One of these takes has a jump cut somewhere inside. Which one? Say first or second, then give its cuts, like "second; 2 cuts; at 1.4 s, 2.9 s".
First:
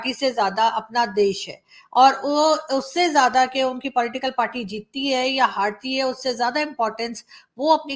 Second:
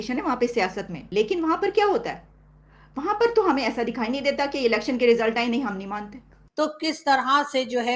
second; 2 cuts; at 1.0 s, 6.4 s